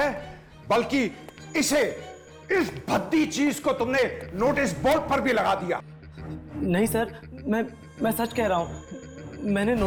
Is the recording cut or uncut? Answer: uncut